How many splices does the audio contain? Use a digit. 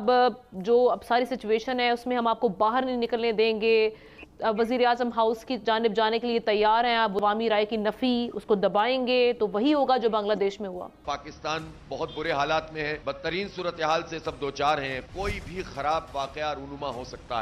2